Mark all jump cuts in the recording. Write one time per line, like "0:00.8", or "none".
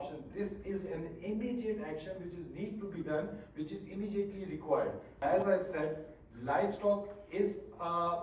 0:05.2